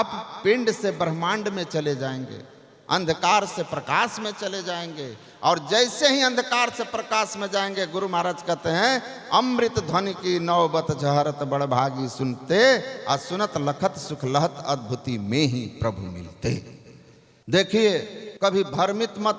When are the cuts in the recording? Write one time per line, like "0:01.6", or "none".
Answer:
0:17.3